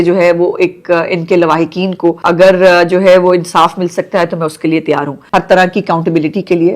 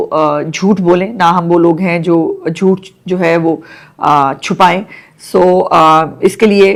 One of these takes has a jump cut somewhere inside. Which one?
first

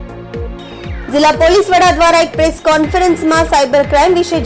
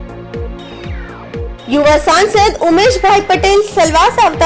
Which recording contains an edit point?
second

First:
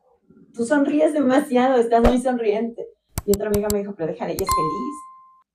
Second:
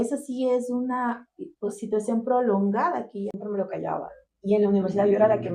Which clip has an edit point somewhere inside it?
second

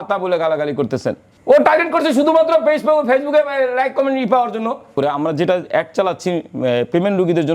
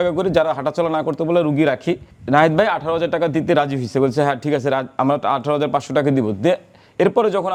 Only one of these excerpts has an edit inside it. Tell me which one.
first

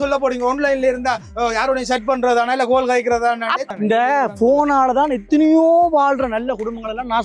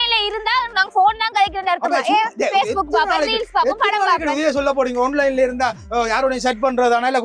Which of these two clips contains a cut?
first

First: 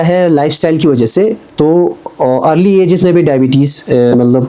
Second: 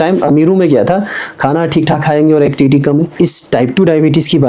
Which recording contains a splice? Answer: second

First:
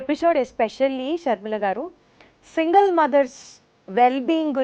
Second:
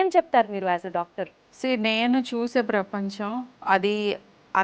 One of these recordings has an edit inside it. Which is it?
second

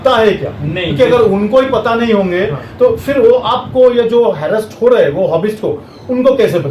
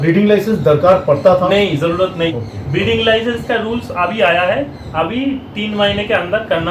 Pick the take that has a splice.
second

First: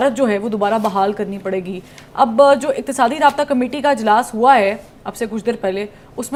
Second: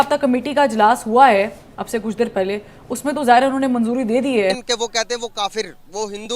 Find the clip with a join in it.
second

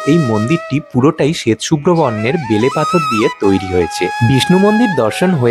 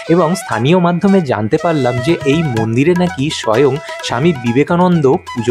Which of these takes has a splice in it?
first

